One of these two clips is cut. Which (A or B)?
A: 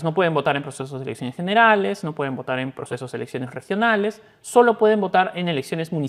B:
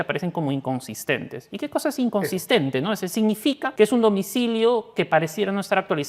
B